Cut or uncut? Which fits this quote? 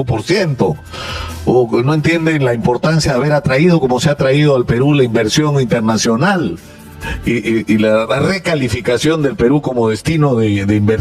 uncut